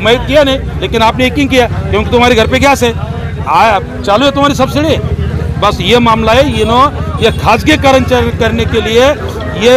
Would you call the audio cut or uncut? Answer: uncut